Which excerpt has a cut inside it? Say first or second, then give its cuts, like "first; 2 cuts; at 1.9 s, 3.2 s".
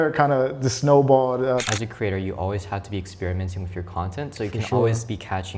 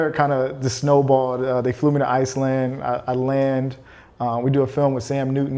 first; 1 cut; at 1.6 s